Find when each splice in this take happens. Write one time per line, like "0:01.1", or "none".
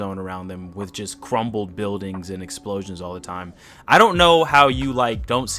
none

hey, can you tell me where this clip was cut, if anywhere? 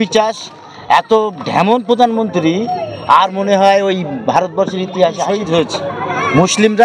0:05.4

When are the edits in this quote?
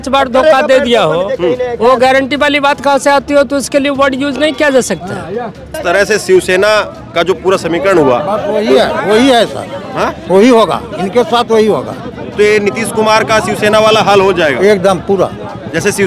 0:05.8

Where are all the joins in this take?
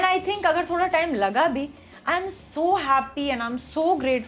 none

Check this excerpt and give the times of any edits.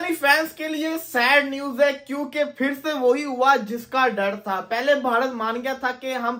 none

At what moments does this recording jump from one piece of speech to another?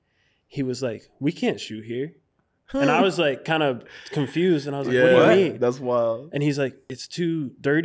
0:06.8

